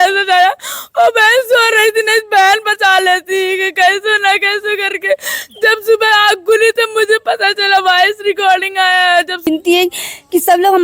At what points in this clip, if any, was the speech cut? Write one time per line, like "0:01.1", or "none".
0:09.4